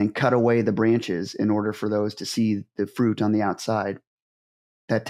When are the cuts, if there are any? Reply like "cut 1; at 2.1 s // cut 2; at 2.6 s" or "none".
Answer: none